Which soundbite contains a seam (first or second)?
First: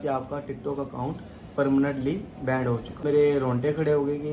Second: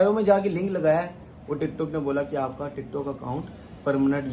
first